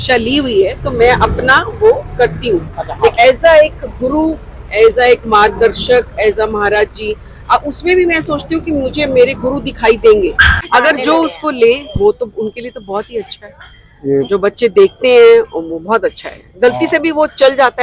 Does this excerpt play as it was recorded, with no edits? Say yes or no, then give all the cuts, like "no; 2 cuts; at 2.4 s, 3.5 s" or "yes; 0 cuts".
no; 2 cuts; at 3.1 s, 10.5 s